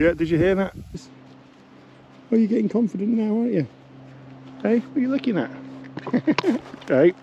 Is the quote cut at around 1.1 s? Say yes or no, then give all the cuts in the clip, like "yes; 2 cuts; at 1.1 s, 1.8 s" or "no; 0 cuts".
yes; 1 cut; at 1.1 s